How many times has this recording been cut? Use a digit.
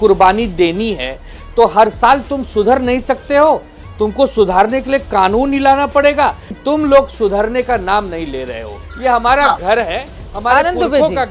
2